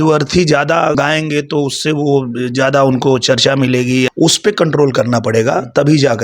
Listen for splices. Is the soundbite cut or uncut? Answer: cut